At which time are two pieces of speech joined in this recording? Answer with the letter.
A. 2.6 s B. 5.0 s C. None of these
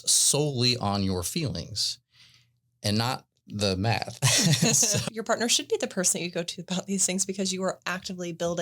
B